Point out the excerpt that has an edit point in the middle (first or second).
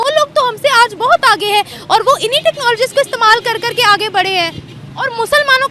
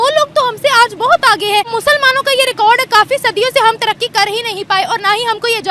second